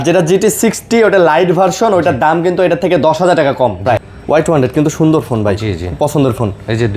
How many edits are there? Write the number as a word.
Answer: one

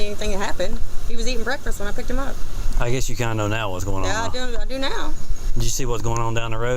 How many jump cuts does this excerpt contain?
zero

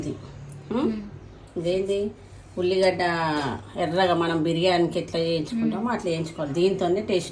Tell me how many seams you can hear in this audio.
zero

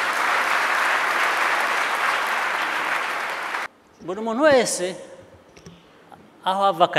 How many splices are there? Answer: one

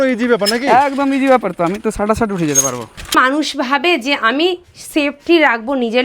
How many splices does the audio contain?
one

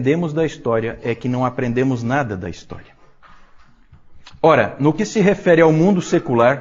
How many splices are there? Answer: one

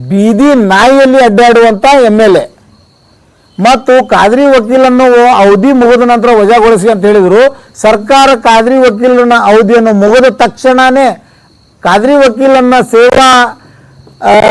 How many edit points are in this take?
zero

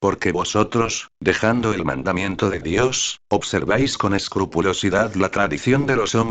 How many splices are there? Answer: one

